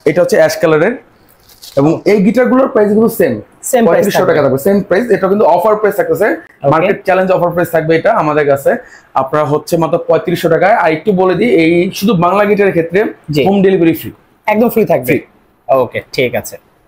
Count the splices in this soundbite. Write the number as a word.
zero